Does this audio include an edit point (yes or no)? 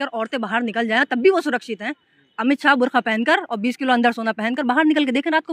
no